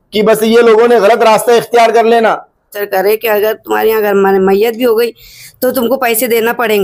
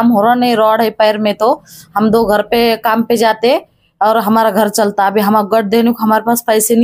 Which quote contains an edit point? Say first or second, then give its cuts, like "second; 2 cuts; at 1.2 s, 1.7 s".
first; 1 cut; at 2.8 s